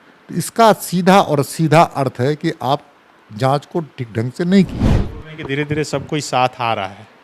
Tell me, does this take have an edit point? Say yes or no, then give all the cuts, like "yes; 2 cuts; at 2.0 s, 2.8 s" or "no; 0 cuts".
yes; 1 cut; at 4.8 s